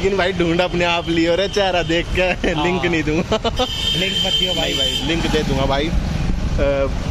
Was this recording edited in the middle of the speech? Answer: no; 0 cuts

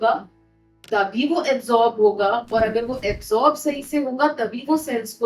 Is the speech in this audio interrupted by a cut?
no; 0 cuts

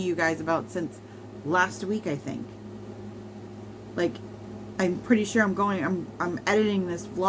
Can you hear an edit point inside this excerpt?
no; 0 cuts

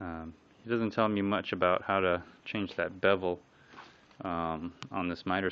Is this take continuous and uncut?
yes; 0 cuts

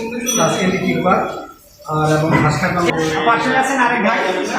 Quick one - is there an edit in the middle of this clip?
yes; 1 cut; at 2.9 s

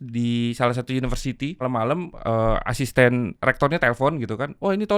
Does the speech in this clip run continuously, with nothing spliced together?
no; 1 cut; at 1.6 s

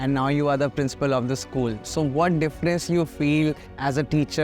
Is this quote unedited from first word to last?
yes; 0 cuts

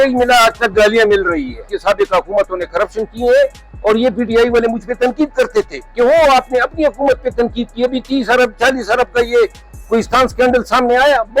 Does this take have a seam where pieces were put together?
yes; 1 cut; at 1.7 s

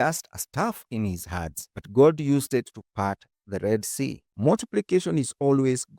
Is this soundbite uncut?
no; 1 cut; at 4.3 s

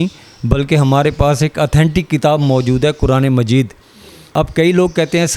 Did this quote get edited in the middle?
yes; 1 cut; at 4.2 s

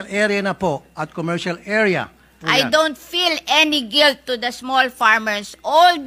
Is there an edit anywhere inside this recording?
yes; 1 cut; at 2.3 s

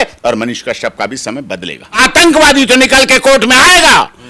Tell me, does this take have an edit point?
yes; 1 cut; at 2.0 s

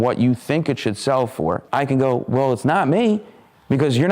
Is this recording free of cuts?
no; 1 cut; at 1.6 s

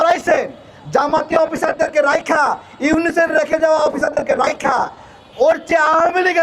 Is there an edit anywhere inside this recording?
no; 0 cuts

